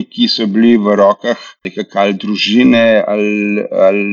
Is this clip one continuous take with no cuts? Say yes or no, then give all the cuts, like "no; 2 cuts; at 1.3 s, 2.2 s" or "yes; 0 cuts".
no; 1 cut; at 1.7 s